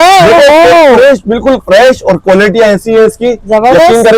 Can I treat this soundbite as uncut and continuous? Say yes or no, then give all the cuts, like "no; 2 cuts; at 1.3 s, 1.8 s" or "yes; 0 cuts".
yes; 0 cuts